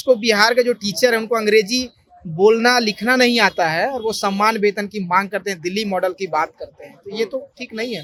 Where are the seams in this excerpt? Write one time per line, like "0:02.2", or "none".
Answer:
none